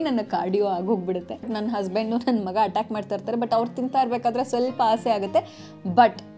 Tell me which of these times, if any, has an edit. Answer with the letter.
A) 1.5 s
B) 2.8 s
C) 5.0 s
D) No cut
A